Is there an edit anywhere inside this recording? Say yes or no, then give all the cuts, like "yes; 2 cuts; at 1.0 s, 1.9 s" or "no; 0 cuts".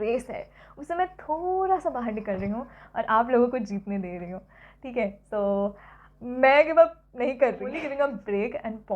yes; 1 cut; at 7.8 s